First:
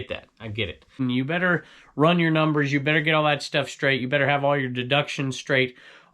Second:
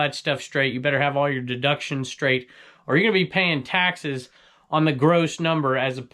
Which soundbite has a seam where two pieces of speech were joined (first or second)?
first